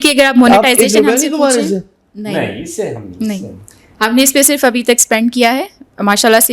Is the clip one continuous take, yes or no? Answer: yes